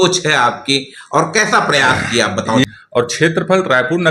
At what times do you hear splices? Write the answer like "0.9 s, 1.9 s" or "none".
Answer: 2.6 s